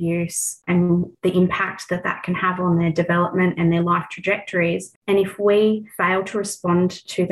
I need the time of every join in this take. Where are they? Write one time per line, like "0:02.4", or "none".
0:04.9
0:05.9

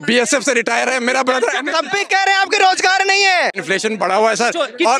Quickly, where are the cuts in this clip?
0:03.6

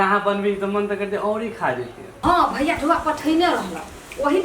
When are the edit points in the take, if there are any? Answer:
0:02.2

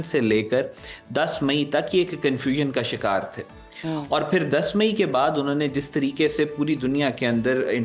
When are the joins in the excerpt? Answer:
none

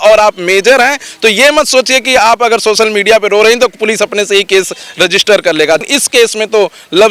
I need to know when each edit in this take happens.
0:05.8

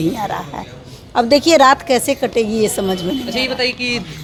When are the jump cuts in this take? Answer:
none

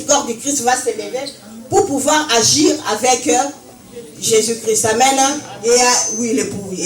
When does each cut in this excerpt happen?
0:05.5

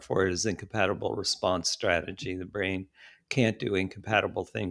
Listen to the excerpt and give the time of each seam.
none

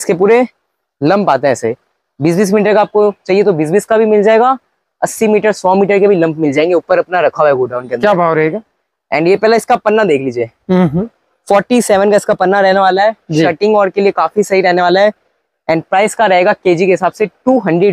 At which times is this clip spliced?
none

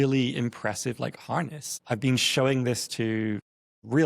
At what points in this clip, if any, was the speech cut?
0:01.8

